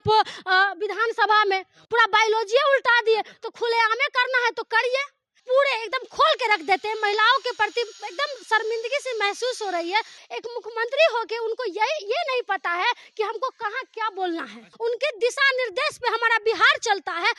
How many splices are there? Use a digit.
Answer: 3